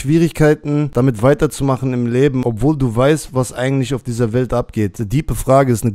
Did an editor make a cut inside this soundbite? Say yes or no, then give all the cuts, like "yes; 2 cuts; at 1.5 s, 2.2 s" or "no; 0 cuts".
yes; 3 cuts; at 0.9 s, 2.4 s, 5.0 s